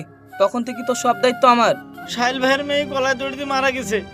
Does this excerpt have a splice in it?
yes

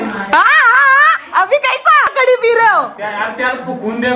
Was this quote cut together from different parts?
yes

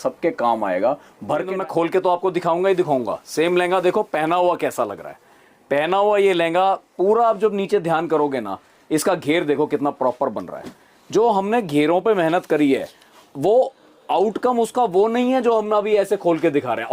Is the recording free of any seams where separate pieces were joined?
no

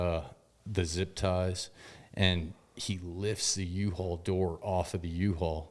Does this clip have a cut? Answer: no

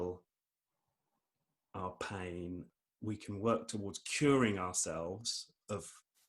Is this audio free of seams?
no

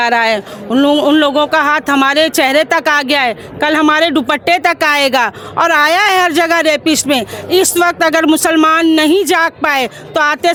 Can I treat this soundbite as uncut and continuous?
yes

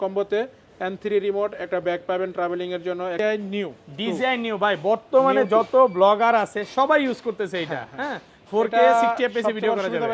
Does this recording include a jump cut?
yes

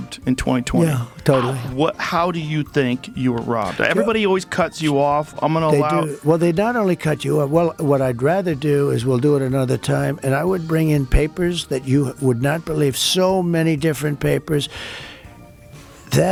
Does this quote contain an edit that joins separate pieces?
no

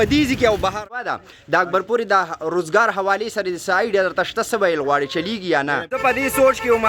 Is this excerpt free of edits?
no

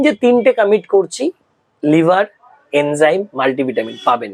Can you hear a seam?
no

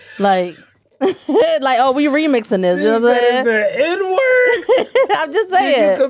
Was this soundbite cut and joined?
no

